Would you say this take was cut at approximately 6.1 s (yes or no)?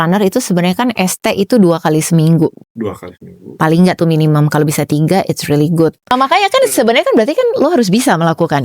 yes